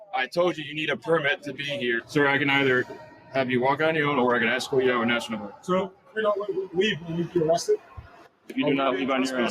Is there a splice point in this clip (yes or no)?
yes